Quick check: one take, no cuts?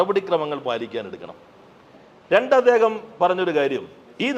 yes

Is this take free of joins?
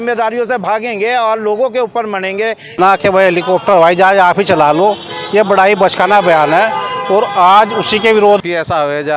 no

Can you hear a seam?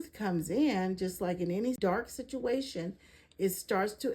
yes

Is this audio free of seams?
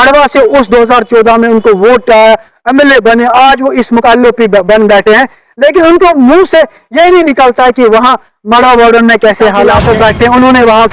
no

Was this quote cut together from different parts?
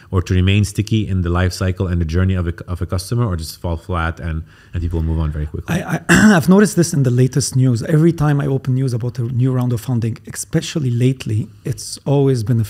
no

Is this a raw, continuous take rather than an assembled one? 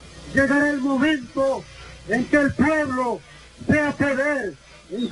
no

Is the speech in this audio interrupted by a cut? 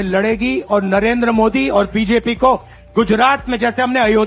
no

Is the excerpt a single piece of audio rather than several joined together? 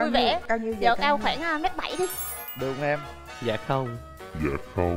yes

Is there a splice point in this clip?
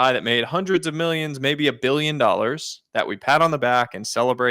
no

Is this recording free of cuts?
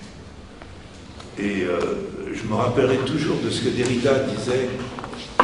no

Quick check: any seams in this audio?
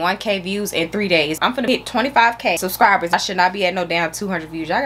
yes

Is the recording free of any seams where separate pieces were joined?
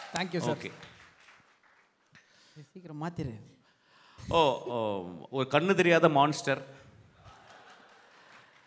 yes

